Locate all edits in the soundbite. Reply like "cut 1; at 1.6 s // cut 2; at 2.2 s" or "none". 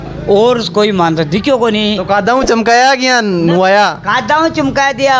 none